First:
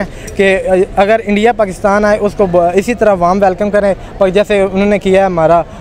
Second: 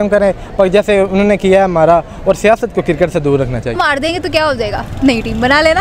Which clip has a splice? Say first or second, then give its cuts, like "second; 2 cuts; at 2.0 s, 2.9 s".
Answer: second; 1 cut; at 3.7 s